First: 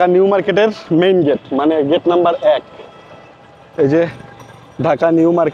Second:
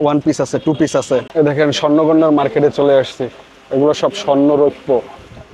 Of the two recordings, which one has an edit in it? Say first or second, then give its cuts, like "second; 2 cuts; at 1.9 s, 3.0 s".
second; 1 cut; at 1.3 s